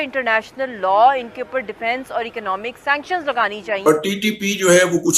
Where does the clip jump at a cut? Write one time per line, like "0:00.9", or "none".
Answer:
0:03.8

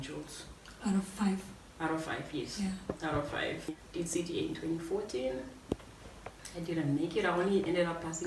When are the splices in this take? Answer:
0:03.7

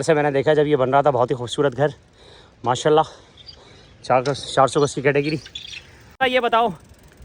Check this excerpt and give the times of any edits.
0:06.2

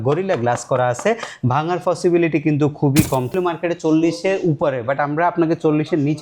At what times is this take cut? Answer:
0:03.3

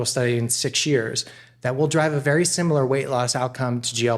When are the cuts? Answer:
none

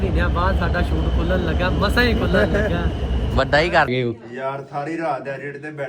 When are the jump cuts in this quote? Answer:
0:03.9

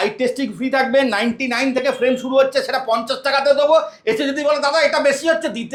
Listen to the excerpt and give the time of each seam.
none

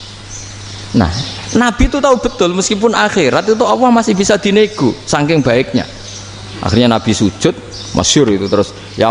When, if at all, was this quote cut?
none

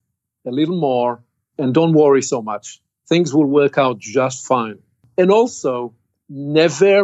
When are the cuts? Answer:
0:01.4
0:05.0

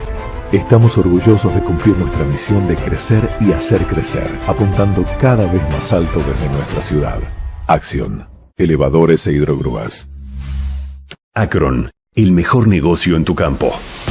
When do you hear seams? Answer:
0:11.1

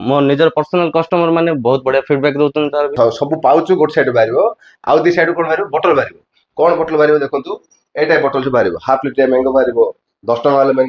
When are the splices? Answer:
0:02.9

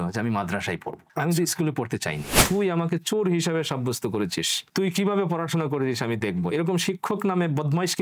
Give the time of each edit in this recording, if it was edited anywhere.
0:01.0
0:02.4

